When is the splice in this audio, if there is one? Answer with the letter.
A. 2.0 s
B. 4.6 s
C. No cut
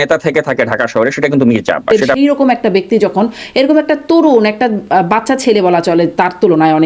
A